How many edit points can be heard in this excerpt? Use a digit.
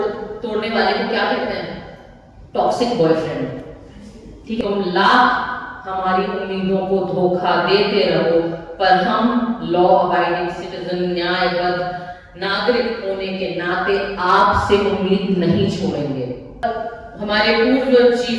2